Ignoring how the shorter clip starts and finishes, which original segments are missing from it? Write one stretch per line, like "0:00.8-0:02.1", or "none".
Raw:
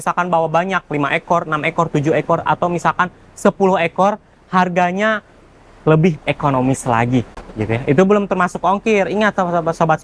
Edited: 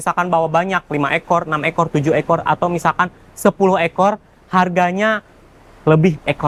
none